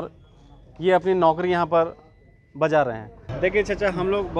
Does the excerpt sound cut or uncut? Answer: cut